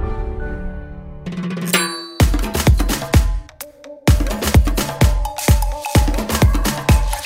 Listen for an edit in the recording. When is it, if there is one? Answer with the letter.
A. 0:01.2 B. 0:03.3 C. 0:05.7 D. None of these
A